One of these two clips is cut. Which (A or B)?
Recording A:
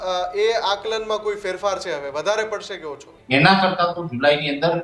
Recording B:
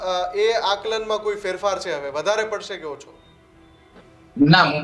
A